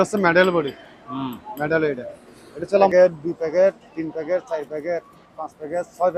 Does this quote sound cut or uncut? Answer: cut